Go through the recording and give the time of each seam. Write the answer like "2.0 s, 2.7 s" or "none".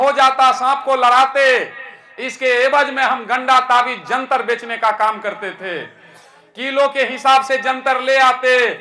none

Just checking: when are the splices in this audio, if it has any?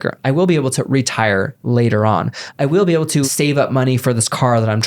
3.3 s

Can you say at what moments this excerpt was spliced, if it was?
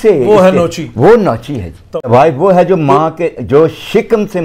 1.9 s

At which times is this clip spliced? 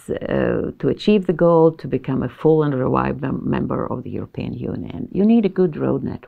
5.1 s

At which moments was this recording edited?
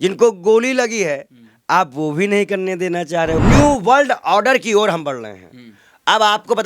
3.4 s

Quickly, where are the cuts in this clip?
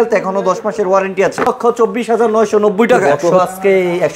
1.5 s, 3.3 s

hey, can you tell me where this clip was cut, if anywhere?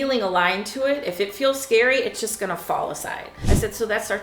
3.3 s

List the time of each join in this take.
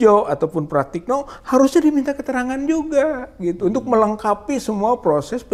none

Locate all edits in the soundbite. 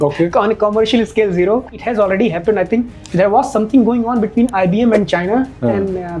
1.7 s

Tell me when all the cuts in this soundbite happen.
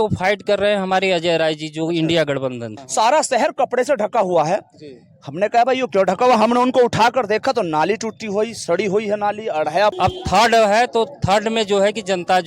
2.8 s, 9.9 s

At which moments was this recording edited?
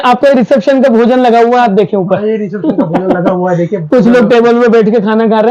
none

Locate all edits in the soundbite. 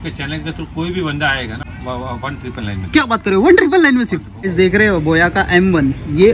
1.6 s, 4.4 s

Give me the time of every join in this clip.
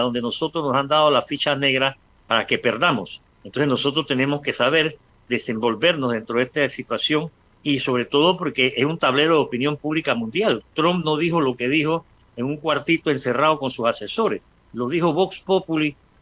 5.1 s

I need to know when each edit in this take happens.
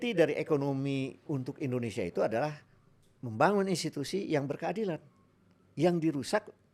none

